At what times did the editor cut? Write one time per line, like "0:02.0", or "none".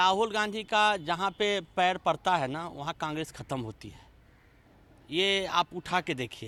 none